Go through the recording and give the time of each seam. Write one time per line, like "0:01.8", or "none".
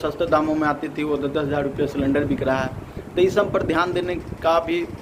none